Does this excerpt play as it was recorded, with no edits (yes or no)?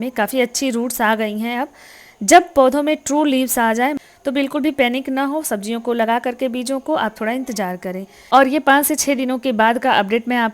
no